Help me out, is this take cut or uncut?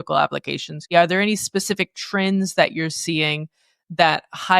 cut